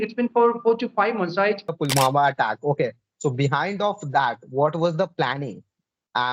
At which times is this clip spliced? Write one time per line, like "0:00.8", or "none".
0:01.7